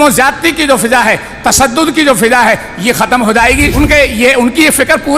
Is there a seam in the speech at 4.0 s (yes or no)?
yes